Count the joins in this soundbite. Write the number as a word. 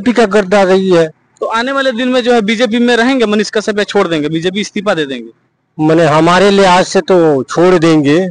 zero